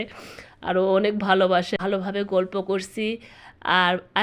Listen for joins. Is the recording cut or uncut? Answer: cut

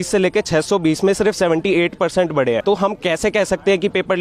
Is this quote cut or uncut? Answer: cut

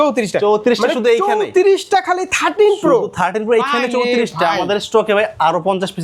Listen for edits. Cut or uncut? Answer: uncut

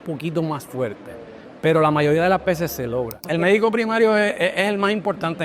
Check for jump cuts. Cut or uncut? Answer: cut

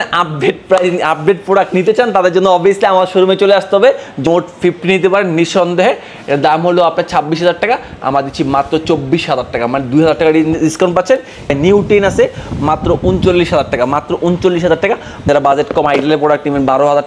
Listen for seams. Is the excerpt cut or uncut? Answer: cut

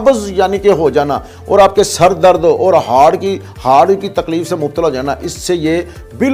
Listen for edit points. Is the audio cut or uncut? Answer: uncut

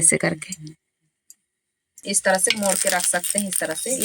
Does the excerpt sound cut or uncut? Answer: cut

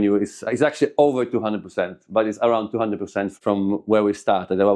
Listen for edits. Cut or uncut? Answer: cut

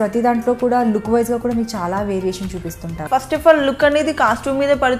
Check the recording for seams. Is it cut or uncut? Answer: cut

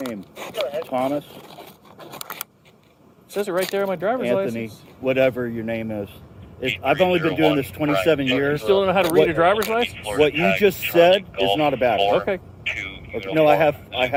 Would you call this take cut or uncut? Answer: uncut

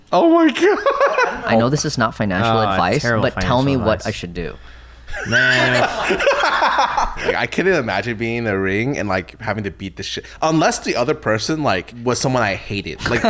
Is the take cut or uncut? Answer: cut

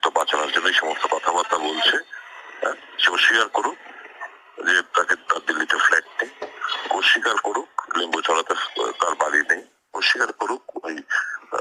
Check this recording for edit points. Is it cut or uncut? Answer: uncut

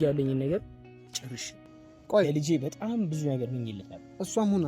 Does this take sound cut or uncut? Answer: cut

